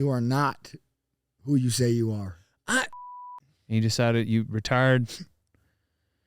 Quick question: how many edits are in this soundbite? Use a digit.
1